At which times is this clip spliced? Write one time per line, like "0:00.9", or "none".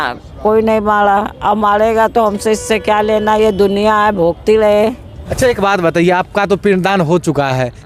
0:05.2